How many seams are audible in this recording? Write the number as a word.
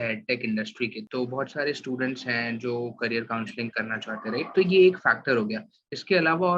one